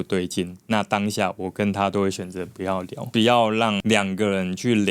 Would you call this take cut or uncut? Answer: cut